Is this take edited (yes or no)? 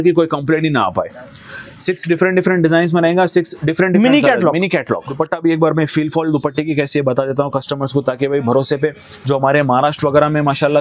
yes